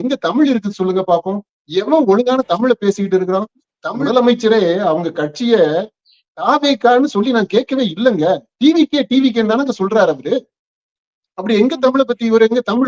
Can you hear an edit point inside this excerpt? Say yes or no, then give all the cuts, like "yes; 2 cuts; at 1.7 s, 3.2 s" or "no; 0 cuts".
yes; 1 cut; at 4.0 s